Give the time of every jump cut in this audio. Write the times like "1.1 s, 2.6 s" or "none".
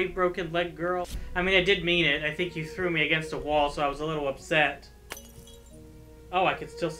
1.2 s